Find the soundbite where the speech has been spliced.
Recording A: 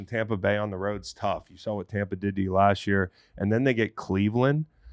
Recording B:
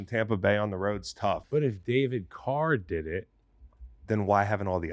B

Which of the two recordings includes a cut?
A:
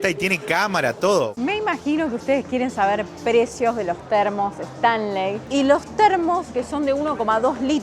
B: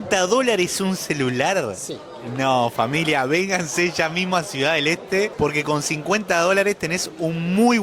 A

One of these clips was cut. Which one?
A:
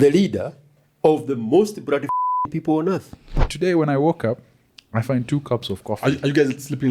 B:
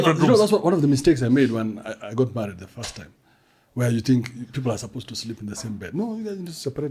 A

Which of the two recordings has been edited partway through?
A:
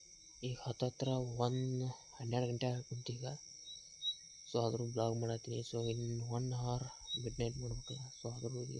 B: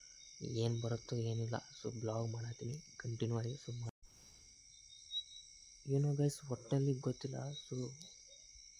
B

